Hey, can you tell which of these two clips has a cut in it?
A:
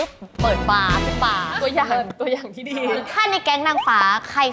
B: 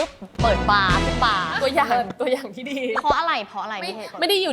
A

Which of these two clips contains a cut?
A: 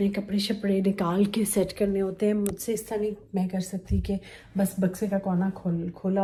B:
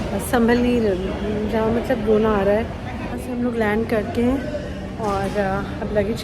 B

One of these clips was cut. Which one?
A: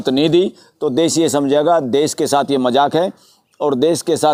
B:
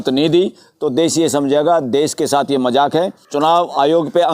B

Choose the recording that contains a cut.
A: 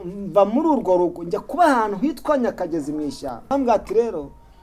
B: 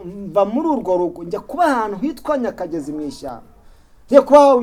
A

